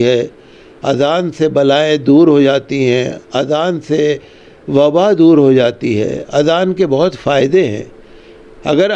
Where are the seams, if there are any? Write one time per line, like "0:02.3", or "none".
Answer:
none